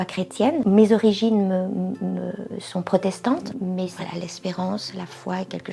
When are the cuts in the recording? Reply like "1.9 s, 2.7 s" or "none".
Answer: none